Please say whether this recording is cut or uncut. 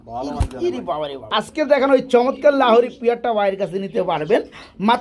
cut